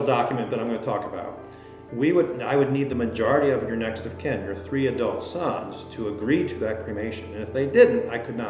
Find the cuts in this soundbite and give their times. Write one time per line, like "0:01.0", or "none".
none